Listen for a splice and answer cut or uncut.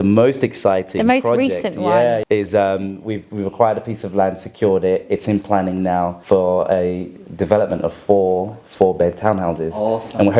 cut